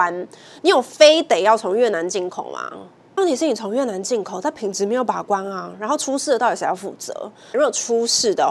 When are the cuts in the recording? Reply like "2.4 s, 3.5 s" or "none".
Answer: 3.2 s, 7.5 s